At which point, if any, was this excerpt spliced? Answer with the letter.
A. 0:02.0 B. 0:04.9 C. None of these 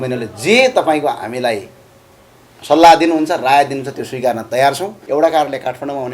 B